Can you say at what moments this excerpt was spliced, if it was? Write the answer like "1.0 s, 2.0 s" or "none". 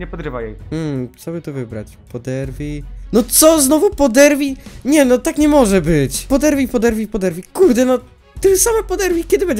none